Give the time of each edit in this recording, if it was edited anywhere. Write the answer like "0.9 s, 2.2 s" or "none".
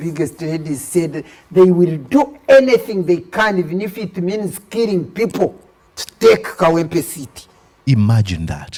none